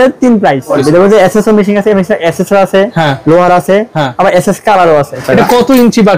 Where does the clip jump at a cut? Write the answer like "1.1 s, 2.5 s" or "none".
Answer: 0.8 s, 5.2 s